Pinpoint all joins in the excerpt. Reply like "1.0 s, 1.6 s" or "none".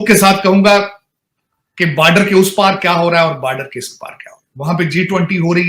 none

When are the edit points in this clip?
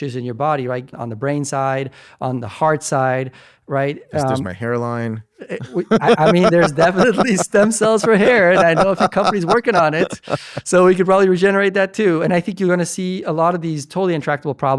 1.0 s

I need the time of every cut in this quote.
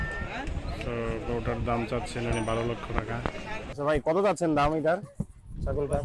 3.7 s

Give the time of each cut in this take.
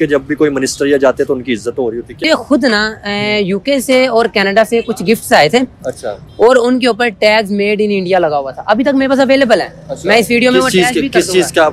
2.2 s

